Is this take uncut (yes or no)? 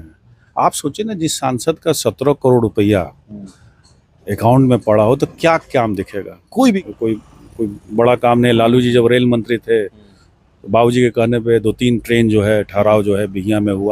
no